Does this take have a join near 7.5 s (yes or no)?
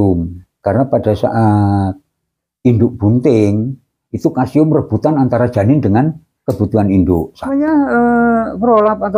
yes